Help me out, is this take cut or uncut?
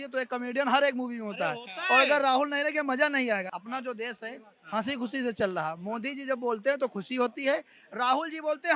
cut